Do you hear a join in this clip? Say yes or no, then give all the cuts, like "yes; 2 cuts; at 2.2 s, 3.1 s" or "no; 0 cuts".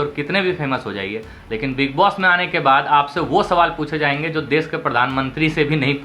no; 0 cuts